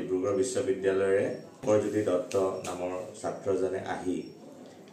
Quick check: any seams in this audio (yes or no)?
yes